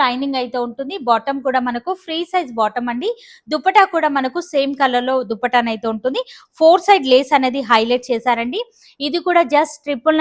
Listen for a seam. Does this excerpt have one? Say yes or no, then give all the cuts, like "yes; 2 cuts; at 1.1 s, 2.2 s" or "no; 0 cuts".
no; 0 cuts